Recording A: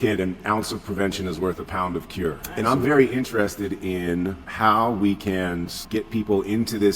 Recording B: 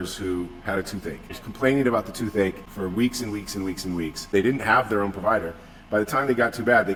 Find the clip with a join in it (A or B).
A